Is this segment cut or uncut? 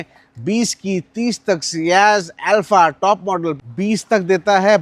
cut